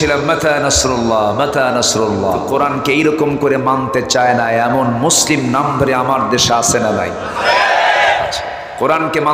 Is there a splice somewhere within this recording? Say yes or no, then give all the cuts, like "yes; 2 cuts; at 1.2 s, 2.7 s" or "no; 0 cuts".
yes; 1 cut; at 2.5 s